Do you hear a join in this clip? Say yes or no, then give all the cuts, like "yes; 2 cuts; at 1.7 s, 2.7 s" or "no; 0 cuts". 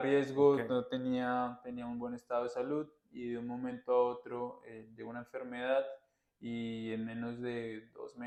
no; 0 cuts